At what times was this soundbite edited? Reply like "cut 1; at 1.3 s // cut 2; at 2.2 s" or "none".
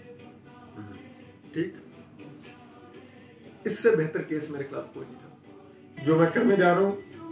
cut 1; at 5.9 s

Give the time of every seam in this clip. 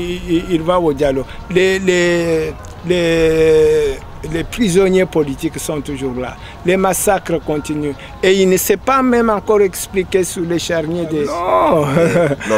cut 1; at 11.3 s

